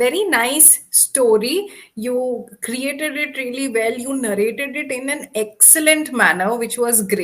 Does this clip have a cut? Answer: no; 0 cuts

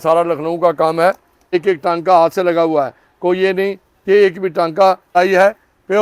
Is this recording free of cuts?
no; 2 cuts; at 1.5 s, 5.1 s

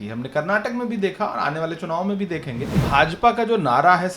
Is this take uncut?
no; 1 cut; at 2.8 s

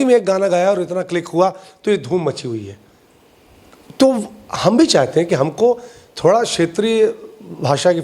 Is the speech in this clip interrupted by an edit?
no; 0 cuts

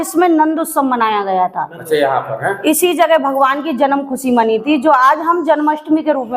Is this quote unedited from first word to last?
yes; 0 cuts

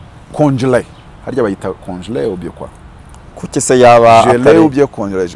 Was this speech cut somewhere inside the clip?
no; 0 cuts

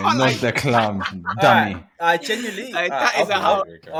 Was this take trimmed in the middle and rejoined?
no; 0 cuts

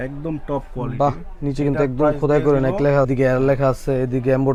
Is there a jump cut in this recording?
no; 0 cuts

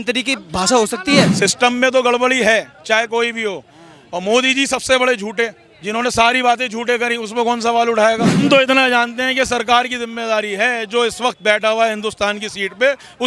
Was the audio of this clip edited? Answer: yes; 2 cuts; at 1.3 s, 8.4 s

